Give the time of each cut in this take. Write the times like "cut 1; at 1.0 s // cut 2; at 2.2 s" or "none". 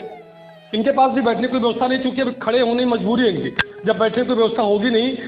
none